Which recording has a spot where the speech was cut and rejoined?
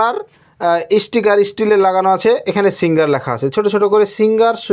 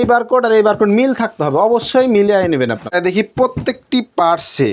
second; 1 cut; at 2.9 s

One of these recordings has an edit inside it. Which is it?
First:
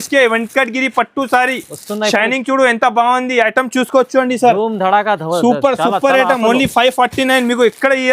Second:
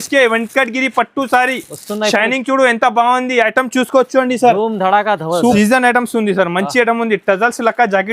second; 1 cut; at 5.5 s

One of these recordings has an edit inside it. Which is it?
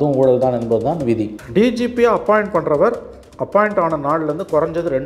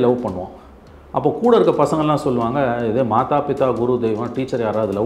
first; 1 cut; at 1.4 s

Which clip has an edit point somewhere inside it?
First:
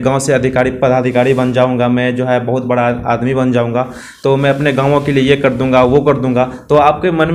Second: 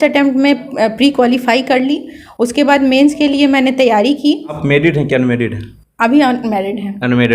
second; 1 cut; at 4.6 s

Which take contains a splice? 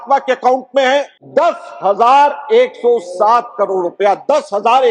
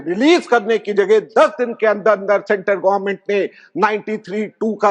first; 1 cut; at 1.2 s

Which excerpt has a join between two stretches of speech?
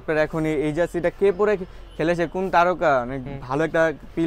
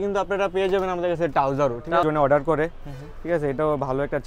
second; 1 cut; at 2.0 s

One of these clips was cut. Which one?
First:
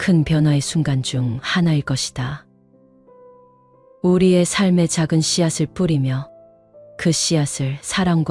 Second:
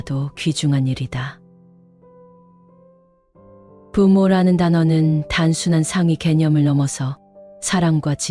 second; 2 cuts; at 1.4 s, 3.9 s

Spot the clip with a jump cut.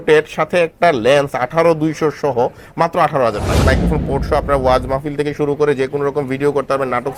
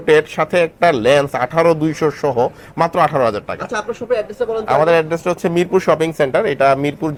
first; 1 cut; at 3.6 s

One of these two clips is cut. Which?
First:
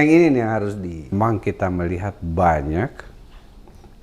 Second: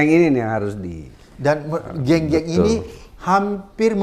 first; 1 cut; at 1.0 s

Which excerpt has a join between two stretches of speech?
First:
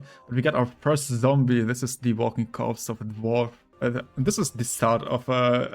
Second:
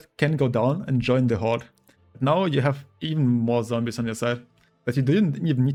first; 1 cut; at 3.6 s

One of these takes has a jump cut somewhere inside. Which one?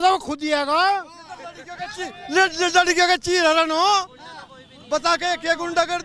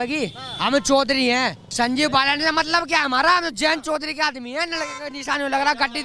second; 1 cut; at 1.6 s

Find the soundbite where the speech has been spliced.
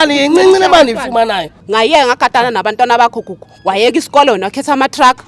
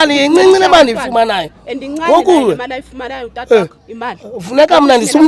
first; 1 cut; at 1.5 s

